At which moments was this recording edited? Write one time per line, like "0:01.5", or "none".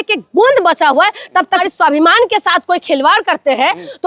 0:01.5